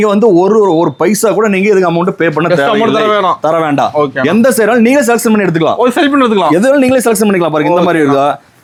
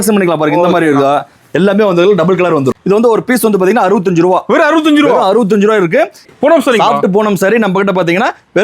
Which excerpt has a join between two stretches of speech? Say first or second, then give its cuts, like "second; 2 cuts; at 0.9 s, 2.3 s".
second; 2 cuts; at 2.7 s, 6.3 s